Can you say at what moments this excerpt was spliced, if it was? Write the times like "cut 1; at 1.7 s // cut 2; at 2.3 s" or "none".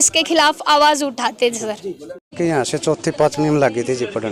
none